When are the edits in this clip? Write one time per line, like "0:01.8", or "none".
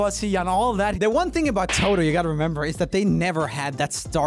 0:00.9